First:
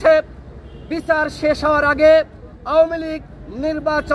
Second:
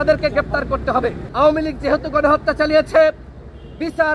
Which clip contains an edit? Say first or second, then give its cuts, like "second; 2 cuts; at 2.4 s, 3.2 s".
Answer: second; 1 cut; at 1.2 s